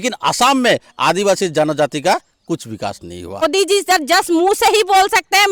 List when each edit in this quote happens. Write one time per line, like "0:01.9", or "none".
0:03.4